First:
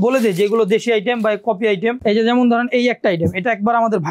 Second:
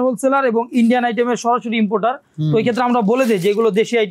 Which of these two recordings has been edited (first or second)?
first